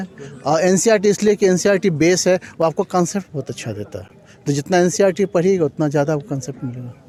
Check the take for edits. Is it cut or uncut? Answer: uncut